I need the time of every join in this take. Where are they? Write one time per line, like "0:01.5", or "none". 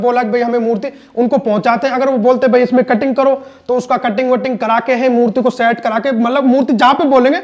none